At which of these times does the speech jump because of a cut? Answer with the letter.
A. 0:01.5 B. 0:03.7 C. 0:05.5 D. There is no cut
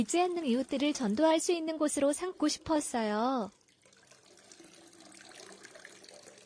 B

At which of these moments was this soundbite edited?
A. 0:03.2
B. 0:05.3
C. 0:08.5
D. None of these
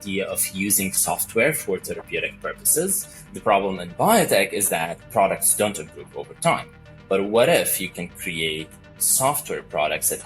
A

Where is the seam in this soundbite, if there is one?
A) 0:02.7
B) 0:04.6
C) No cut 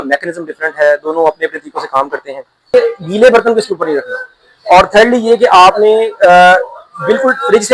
A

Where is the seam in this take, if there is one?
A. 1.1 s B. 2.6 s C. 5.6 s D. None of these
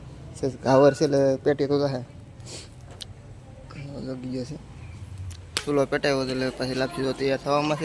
C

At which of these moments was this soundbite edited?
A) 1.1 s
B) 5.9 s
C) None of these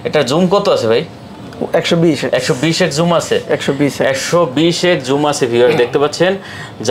C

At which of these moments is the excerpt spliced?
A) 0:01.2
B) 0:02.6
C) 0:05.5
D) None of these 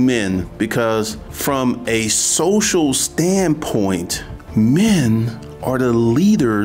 A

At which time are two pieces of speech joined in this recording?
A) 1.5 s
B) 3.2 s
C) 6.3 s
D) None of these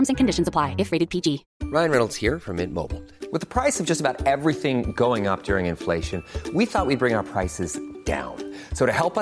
A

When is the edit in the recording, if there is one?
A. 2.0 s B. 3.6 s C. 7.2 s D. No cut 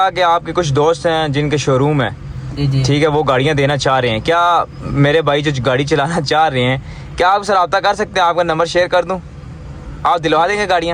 D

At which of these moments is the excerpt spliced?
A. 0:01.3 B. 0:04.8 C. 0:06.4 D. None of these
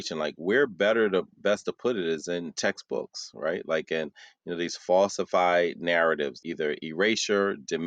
C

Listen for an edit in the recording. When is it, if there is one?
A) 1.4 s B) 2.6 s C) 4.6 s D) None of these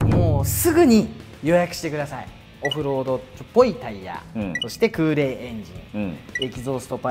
B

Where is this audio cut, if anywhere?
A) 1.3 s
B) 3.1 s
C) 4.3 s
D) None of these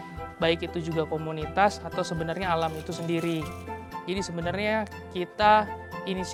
D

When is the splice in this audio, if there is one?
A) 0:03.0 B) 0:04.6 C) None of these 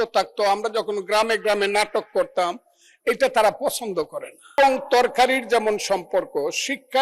B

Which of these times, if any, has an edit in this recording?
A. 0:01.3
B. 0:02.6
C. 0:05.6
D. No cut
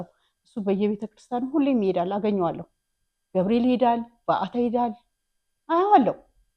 D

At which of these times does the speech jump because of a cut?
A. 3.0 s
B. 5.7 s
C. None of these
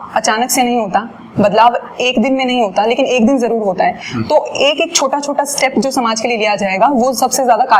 C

